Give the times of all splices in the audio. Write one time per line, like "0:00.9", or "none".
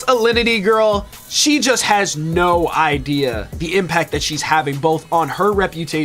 none